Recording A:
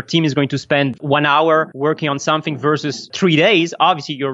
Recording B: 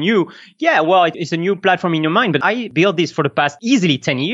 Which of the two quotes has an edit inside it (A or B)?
B